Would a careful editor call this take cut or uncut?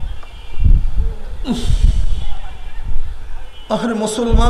uncut